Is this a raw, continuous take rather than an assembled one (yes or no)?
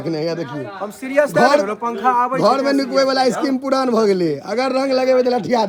yes